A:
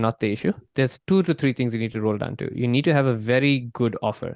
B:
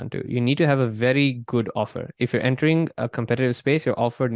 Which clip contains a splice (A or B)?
A